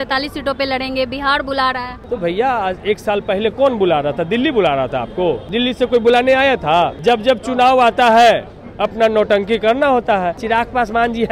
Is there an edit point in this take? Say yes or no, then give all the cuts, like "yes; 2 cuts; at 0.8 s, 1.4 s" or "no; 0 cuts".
yes; 4 cuts; at 1.9 s, 5.4 s, 6.9 s, 10.4 s